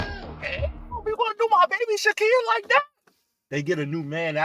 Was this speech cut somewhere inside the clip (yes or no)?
yes